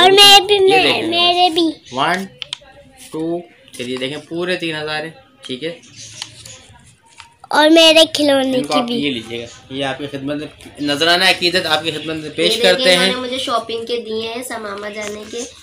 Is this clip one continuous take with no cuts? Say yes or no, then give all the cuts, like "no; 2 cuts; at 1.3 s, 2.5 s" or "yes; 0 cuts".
yes; 0 cuts